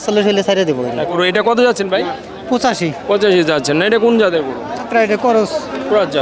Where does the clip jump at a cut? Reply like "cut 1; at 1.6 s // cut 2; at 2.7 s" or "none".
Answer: cut 1; at 1.2 s // cut 2; at 4.9 s